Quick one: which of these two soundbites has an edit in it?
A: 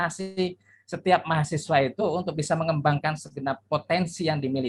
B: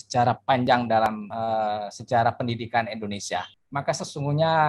B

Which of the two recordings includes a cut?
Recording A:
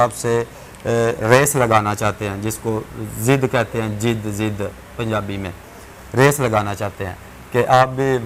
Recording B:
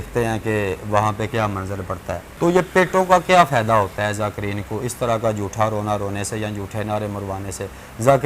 B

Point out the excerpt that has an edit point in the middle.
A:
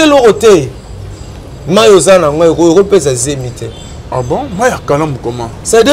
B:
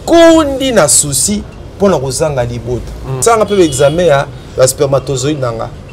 B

